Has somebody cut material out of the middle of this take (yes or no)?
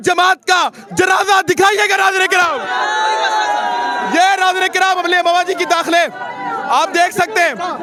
no